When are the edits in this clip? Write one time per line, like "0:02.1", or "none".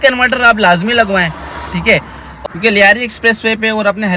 0:02.3